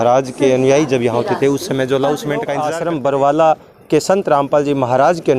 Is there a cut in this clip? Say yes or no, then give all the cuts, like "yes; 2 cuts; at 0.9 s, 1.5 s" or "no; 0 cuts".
yes; 1 cut; at 2.6 s